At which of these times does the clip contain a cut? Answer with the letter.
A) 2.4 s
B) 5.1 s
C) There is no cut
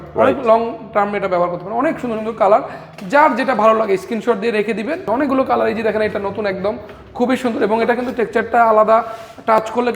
B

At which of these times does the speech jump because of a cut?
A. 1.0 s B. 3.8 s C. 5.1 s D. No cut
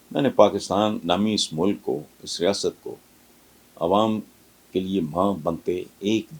A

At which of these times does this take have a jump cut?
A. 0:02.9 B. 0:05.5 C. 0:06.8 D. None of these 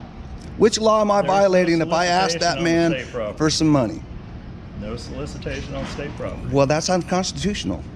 D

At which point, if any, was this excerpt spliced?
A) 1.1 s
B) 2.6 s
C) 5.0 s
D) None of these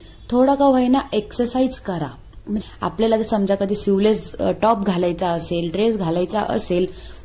B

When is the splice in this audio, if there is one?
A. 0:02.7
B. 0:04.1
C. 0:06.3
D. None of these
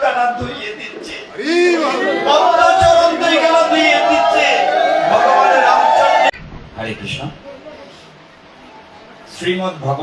C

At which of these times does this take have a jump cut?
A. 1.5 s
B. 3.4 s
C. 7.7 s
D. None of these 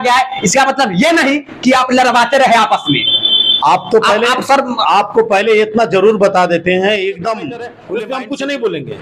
C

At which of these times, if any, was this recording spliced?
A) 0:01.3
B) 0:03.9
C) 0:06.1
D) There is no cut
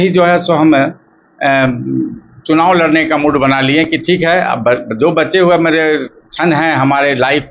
D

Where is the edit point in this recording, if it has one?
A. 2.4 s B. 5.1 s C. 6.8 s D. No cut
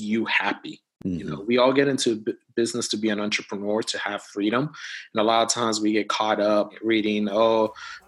C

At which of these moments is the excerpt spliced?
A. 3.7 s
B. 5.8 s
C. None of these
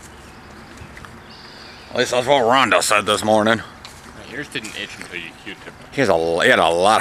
B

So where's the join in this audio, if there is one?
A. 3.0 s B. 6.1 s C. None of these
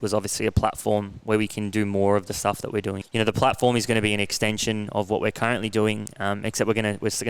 A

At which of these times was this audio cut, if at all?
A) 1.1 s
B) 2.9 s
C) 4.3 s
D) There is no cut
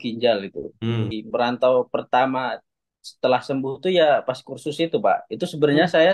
A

